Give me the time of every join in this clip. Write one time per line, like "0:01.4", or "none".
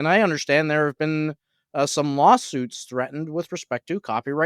none